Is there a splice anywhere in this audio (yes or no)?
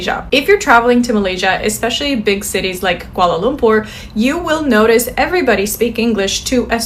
no